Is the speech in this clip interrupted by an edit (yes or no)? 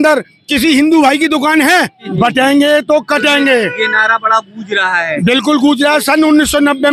yes